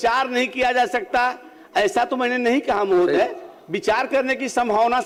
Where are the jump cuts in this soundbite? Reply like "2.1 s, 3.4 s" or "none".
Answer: none